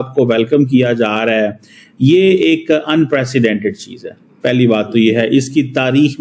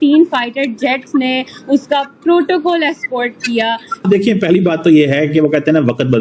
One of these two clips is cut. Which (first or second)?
second